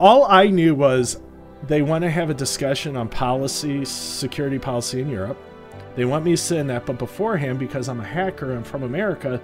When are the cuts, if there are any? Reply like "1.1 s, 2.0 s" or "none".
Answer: none